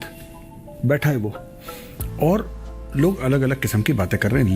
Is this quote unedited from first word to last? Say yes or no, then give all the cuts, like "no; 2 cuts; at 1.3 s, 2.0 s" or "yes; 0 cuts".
yes; 0 cuts